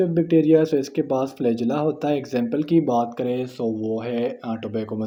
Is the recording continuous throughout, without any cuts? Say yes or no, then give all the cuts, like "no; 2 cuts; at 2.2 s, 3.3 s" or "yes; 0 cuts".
yes; 0 cuts